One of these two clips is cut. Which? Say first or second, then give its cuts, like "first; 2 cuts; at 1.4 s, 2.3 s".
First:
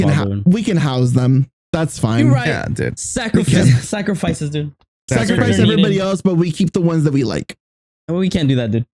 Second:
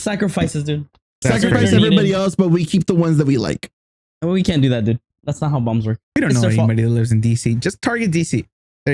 second; 1 cut; at 6.2 s